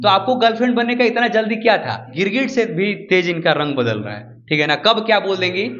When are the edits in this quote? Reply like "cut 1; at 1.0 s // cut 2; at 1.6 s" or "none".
cut 1; at 2.1 s